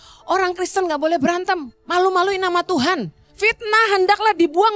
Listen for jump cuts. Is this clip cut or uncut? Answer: cut